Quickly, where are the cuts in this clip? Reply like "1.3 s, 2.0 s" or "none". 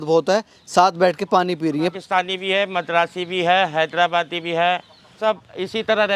1.9 s, 5.2 s